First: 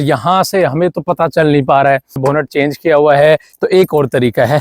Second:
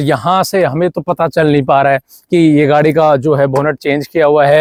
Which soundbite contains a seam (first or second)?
first